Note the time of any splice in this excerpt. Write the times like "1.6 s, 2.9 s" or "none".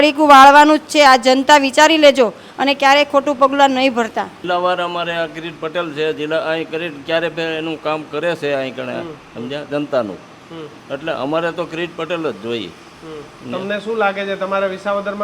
4.4 s